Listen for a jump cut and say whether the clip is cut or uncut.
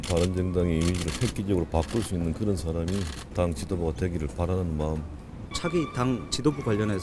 uncut